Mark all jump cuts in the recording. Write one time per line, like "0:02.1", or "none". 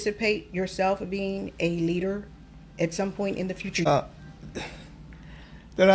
0:03.9